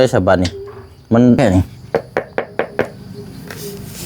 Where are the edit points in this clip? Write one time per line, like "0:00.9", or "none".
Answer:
0:01.4